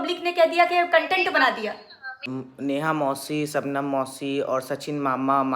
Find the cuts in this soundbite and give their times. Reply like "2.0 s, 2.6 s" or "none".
2.3 s